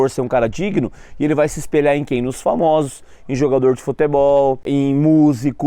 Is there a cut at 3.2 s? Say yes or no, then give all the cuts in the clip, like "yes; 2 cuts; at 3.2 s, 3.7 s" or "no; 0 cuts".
no; 1 cut; at 4.7 s